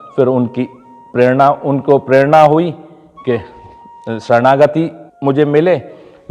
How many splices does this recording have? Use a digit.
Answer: 1